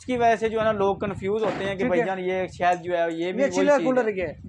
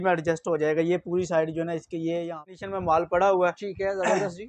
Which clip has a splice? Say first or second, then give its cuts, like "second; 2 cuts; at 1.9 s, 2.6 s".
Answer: second; 1 cut; at 2.6 s